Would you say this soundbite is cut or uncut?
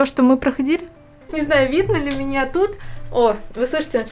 cut